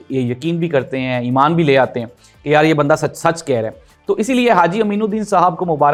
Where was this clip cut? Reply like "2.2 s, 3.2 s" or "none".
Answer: none